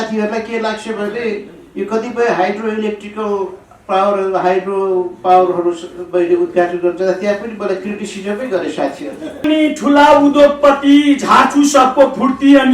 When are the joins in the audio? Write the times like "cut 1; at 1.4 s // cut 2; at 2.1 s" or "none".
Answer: cut 1; at 9.3 s